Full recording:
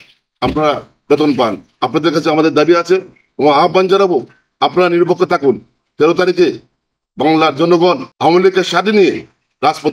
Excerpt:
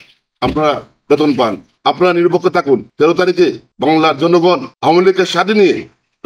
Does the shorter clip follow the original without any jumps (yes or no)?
no